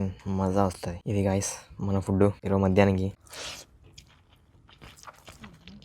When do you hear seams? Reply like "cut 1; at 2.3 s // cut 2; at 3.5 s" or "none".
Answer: cut 1; at 0.9 s // cut 2; at 2.4 s // cut 3; at 3.2 s